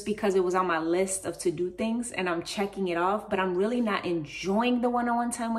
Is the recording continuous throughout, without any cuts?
yes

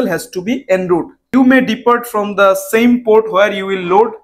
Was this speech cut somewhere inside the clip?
yes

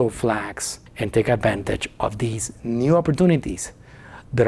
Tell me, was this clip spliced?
no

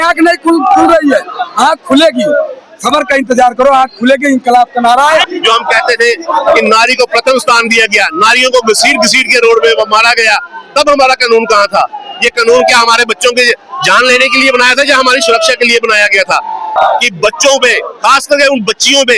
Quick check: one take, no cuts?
no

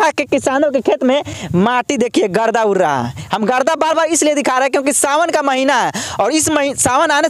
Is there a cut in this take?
no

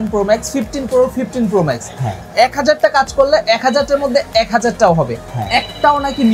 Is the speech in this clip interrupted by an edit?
no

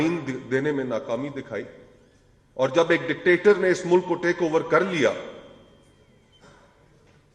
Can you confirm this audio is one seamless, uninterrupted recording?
yes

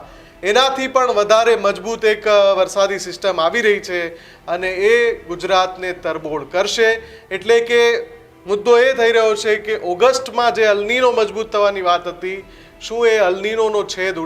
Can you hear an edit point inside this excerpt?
no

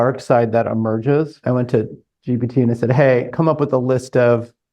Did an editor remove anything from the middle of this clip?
yes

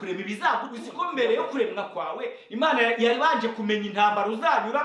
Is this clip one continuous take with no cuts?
no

